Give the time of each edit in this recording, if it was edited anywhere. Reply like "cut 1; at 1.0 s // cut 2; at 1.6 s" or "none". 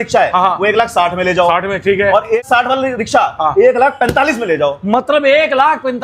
cut 1; at 2.4 s